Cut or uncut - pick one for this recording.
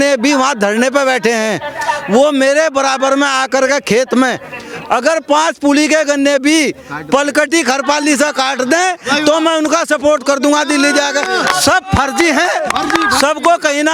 uncut